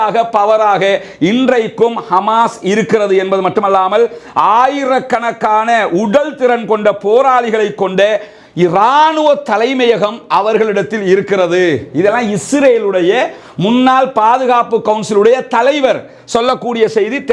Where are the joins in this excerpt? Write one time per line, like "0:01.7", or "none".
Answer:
none